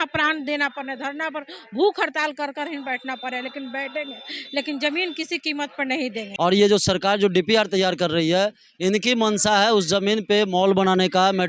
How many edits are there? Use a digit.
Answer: 1